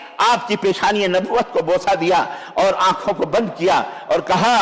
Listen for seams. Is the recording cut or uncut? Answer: uncut